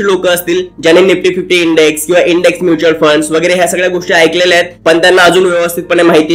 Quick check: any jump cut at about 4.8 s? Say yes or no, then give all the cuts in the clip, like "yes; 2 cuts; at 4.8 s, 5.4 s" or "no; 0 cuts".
no; 0 cuts